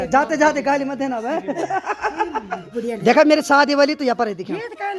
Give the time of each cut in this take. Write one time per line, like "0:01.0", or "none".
0:02.7